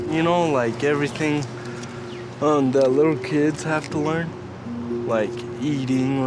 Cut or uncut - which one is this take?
uncut